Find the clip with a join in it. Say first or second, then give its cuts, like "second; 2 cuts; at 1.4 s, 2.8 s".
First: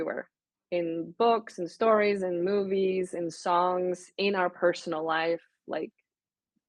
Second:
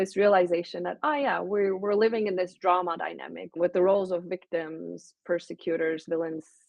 second; 1 cut; at 3.5 s